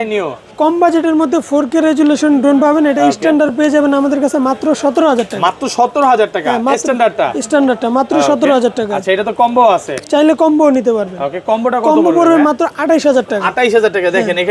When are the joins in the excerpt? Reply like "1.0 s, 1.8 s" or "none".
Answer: none